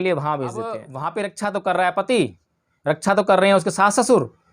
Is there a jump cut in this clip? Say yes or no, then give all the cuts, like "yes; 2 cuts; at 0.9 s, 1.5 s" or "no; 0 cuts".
yes; 1 cut; at 0.9 s